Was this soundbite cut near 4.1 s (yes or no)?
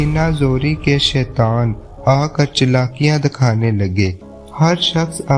yes